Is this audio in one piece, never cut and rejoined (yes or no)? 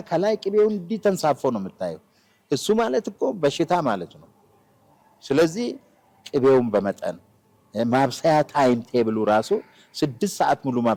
yes